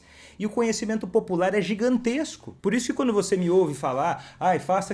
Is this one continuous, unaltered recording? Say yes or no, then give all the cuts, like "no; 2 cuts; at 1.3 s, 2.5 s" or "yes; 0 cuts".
no; 1 cut; at 2.4 s